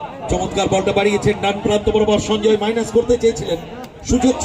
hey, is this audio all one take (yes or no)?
yes